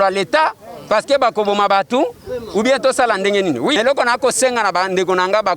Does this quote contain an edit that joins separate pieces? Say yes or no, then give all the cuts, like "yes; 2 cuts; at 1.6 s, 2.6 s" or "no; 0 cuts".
yes; 1 cut; at 3.8 s